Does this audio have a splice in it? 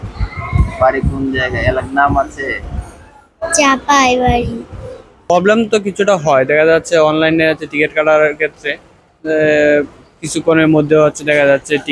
no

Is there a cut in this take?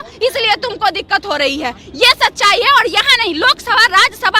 no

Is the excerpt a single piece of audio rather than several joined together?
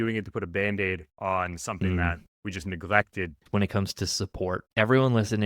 no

